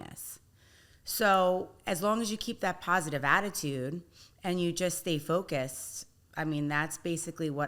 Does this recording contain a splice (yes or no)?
no